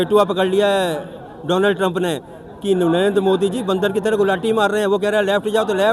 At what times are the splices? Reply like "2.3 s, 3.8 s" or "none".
none